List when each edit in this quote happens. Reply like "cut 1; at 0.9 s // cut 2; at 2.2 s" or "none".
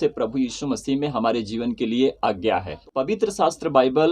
cut 1; at 2.7 s